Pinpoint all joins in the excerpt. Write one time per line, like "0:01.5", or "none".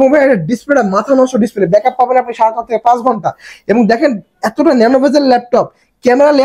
none